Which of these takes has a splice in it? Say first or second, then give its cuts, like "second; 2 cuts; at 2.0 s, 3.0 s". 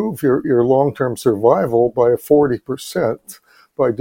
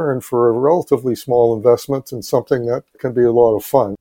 second; 1 cut; at 2.9 s